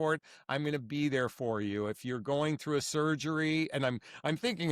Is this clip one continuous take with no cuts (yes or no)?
yes